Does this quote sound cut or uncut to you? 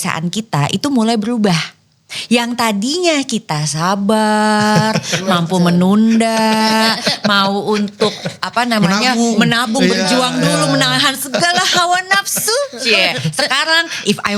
uncut